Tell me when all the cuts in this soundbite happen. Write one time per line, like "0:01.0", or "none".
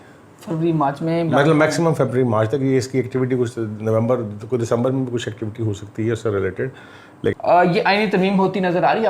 0:07.3